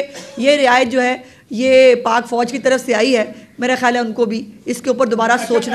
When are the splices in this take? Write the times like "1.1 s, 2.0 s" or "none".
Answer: none